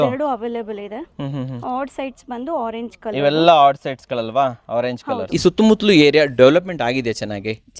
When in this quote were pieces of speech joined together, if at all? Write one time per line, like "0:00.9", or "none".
0:05.2